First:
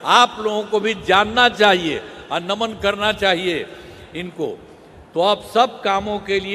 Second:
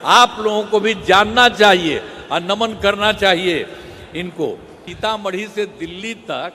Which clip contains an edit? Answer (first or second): second